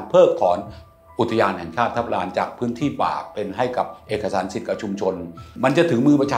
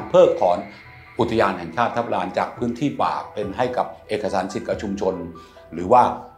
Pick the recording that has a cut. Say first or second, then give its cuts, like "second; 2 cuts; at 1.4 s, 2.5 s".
first; 1 cut; at 5.5 s